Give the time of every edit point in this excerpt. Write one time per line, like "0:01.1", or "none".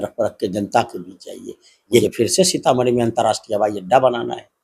0:02.0